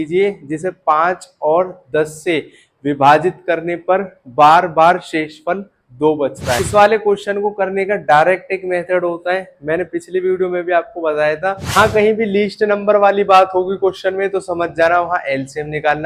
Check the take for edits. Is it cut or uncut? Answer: cut